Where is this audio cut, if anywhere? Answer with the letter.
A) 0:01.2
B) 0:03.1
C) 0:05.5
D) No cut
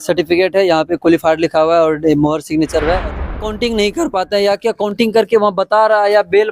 B